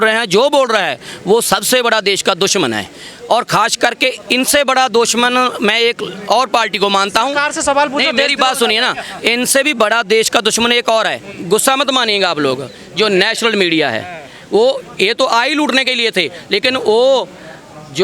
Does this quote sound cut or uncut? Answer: uncut